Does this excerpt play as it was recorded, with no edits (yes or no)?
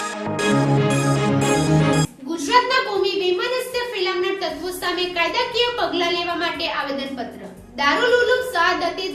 no